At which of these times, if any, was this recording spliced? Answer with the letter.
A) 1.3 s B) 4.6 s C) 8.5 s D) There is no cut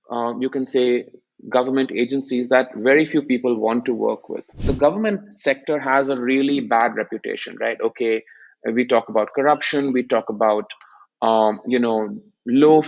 B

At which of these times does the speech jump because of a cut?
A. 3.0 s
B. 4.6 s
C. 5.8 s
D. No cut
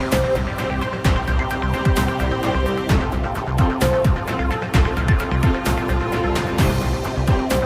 C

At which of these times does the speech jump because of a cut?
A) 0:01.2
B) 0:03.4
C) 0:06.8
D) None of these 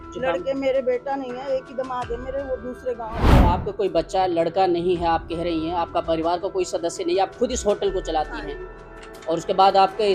B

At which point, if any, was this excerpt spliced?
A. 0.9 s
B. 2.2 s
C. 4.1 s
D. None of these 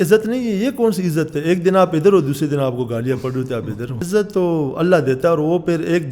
C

